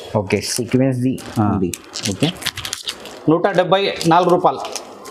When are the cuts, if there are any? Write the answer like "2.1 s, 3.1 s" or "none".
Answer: none